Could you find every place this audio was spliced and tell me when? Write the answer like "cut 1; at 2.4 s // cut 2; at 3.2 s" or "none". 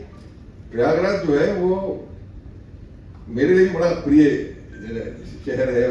none